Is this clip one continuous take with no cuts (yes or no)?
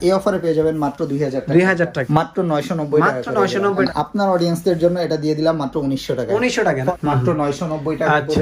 no